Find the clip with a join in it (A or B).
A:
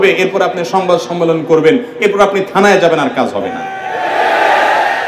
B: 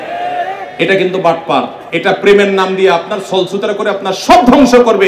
B